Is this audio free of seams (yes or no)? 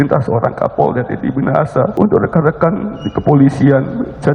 no